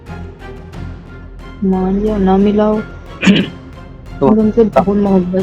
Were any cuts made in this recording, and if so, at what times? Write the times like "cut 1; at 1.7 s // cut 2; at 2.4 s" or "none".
cut 1; at 1.5 s